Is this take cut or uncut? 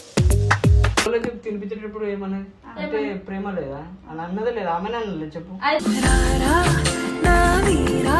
cut